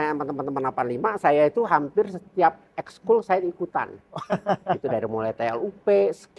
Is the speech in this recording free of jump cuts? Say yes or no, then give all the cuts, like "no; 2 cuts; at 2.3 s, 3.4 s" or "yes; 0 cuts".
yes; 0 cuts